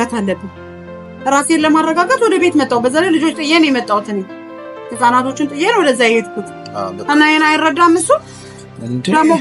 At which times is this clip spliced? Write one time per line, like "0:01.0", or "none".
none